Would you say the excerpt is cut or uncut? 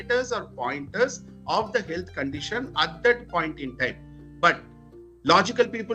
uncut